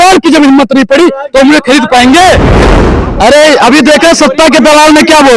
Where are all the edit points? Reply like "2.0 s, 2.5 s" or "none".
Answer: 2.8 s